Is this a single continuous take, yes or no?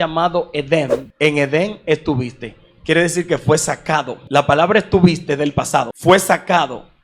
no